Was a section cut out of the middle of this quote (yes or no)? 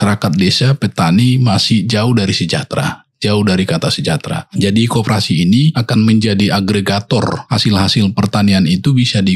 yes